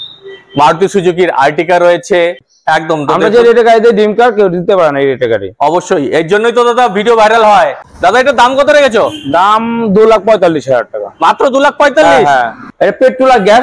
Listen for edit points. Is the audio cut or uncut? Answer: cut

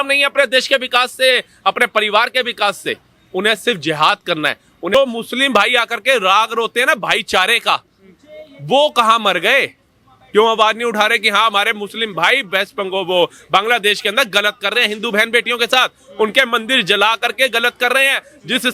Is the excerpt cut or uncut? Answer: cut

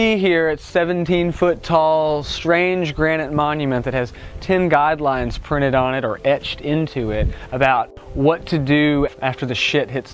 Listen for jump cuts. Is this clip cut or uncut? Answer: uncut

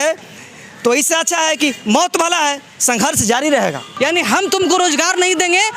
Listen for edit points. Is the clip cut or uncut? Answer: cut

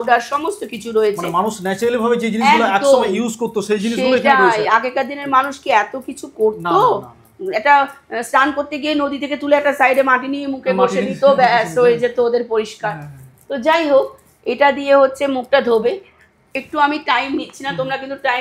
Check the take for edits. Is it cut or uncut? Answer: uncut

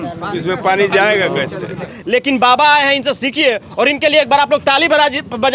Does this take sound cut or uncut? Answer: cut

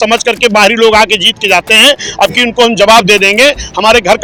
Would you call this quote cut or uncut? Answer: uncut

